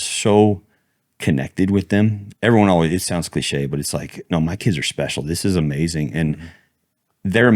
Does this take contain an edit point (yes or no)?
yes